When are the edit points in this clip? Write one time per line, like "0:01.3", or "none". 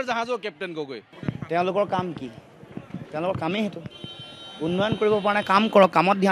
0:01.1